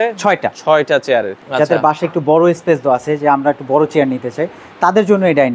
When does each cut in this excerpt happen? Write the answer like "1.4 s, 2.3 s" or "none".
1.4 s